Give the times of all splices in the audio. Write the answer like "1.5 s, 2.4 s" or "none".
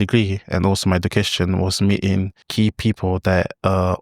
2.4 s